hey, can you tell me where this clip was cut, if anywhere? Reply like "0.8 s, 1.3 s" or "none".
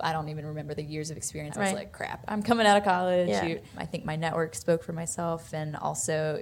1.5 s, 3.8 s